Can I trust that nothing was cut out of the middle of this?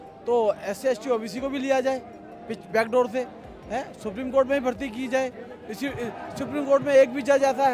yes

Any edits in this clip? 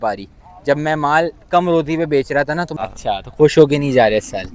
yes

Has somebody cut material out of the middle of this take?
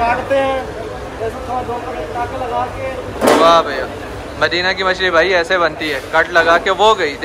no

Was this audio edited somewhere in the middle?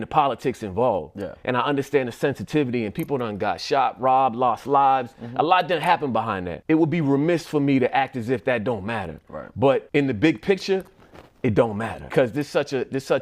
yes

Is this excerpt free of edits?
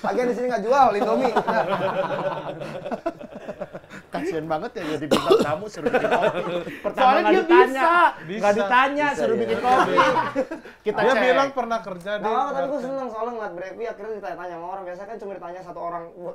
yes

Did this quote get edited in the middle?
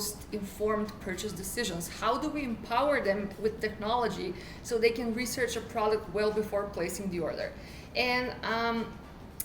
no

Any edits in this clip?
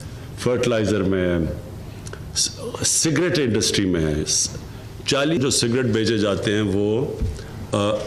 no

